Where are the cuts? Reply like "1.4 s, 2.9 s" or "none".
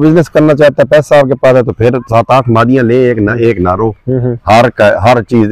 none